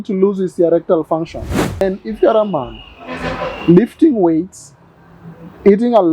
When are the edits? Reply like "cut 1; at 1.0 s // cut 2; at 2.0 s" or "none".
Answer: cut 1; at 1.8 s